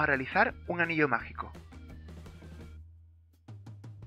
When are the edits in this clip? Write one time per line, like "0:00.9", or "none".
0:01.5